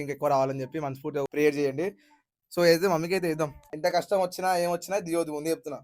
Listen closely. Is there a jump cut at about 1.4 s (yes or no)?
no